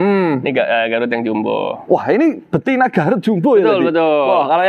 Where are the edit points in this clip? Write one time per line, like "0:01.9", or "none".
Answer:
none